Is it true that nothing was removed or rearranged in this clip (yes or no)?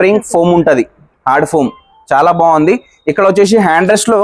yes